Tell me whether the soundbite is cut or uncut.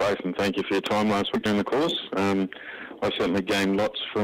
uncut